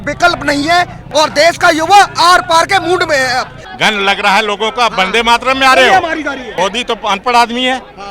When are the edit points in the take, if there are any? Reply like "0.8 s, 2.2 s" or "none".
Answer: 1.0 s, 3.6 s, 6.4 s

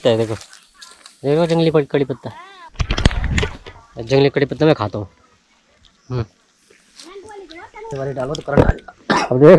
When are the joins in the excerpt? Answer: 7.9 s

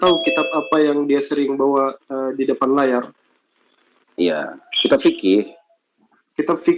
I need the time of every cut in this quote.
none

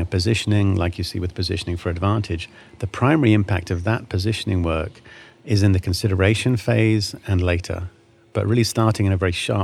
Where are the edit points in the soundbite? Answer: none

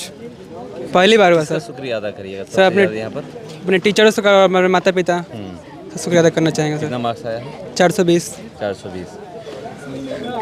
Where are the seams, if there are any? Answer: none

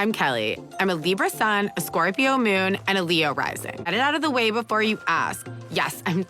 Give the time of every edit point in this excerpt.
3.9 s

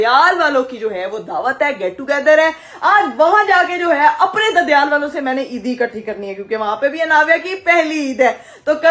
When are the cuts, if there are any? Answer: none

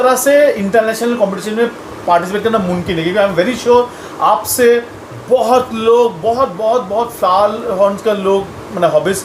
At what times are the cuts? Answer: none

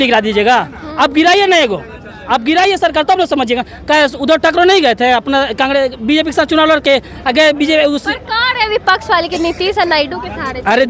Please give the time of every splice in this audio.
none

